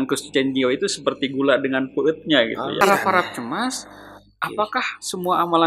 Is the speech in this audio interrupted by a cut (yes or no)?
yes